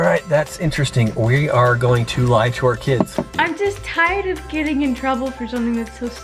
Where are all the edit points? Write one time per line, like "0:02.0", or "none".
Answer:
0:03.3

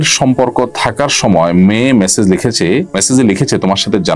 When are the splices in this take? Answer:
0:03.0

